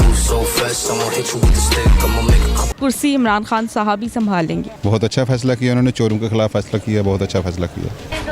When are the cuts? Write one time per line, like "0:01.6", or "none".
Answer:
0:04.7